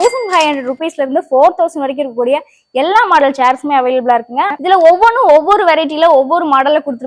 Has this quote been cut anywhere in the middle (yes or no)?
yes